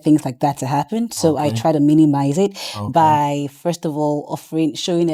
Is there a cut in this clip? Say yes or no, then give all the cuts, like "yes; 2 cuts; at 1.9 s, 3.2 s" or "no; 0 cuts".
no; 0 cuts